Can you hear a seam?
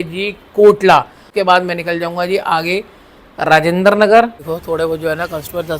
yes; 2 cuts; at 1.3 s, 4.4 s

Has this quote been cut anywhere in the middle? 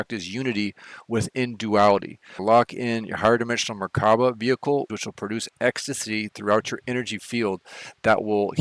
yes; 2 cuts; at 2.3 s, 5.0 s

